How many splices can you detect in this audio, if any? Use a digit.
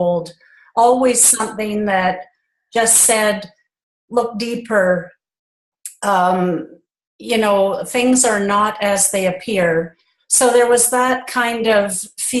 1